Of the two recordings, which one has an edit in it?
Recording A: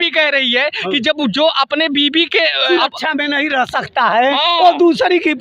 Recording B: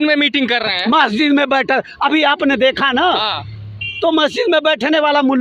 A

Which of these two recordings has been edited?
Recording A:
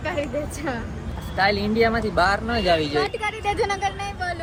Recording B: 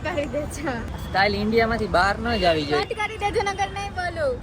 B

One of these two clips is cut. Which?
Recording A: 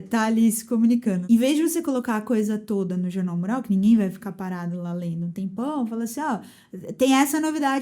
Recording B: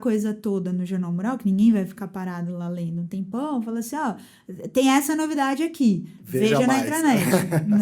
A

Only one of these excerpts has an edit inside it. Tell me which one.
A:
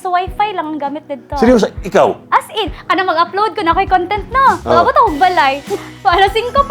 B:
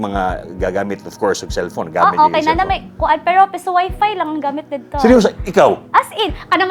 A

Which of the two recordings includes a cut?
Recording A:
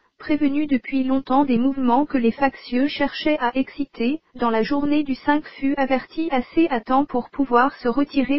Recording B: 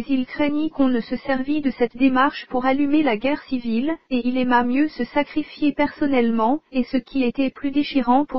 A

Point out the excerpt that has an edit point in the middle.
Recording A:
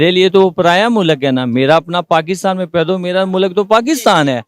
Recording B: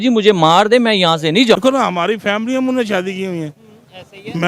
B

